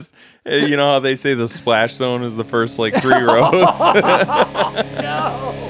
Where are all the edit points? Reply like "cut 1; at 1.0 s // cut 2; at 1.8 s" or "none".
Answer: none